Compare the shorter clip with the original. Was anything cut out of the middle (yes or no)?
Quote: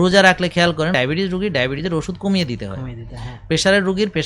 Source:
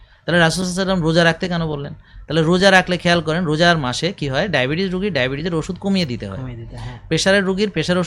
yes